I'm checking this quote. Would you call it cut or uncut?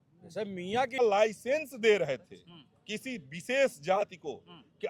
cut